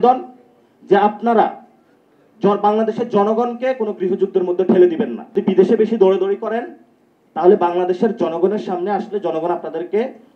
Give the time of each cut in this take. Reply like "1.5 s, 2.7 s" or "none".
5.4 s